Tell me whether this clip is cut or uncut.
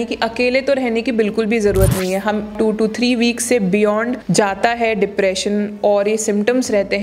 cut